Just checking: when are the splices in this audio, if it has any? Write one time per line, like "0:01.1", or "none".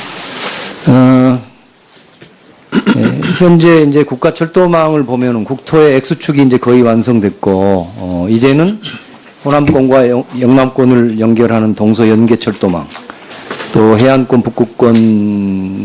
0:11.4